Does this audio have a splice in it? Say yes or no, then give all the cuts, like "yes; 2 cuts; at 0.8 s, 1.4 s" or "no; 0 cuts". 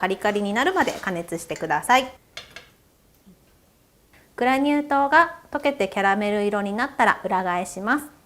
no; 0 cuts